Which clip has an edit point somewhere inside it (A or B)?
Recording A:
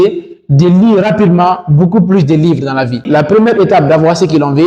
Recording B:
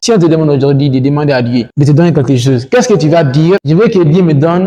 A